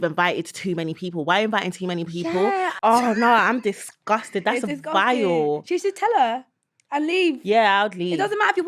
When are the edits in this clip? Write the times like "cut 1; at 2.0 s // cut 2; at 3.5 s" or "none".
cut 1; at 2.7 s